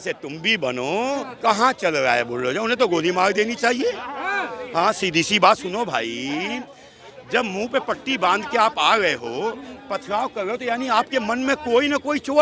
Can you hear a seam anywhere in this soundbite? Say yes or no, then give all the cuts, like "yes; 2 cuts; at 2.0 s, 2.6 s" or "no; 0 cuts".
yes; 1 cut; at 1.3 s